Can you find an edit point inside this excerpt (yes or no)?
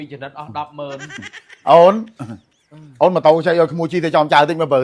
no